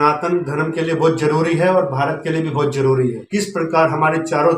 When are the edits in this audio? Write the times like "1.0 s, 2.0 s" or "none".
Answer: 3.2 s